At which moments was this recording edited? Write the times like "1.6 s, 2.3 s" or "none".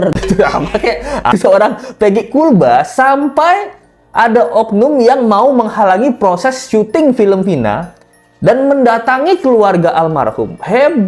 1.3 s